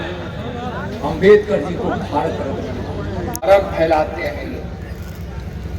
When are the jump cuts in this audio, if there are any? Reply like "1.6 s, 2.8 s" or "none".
3.5 s